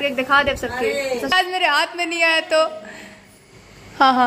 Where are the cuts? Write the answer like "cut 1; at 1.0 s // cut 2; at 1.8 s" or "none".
cut 1; at 1.3 s